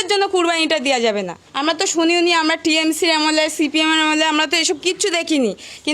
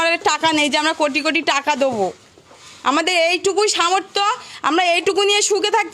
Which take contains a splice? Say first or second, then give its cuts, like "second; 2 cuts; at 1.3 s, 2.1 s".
first; 1 cut; at 1.4 s